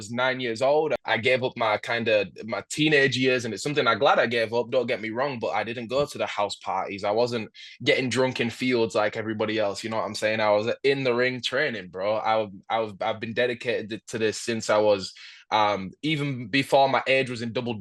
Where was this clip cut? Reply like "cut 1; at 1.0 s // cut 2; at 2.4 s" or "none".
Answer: cut 1; at 1.0 s